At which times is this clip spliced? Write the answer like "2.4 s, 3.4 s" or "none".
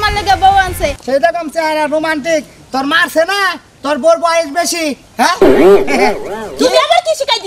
1.0 s

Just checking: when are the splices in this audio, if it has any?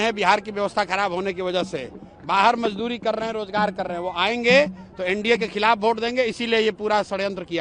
none

